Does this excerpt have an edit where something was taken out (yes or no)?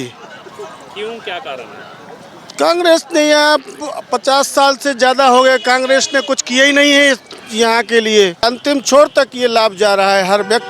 yes